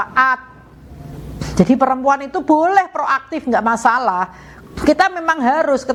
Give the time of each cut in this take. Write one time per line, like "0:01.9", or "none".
none